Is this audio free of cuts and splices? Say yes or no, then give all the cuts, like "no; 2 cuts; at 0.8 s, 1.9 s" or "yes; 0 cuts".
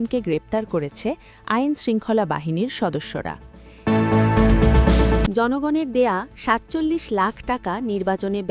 no; 2 cuts; at 3.7 s, 5.3 s